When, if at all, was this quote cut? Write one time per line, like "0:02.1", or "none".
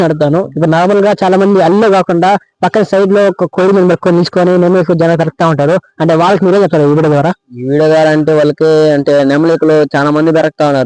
0:03.5